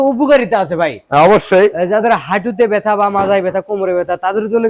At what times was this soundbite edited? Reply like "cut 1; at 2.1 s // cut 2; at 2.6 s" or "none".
none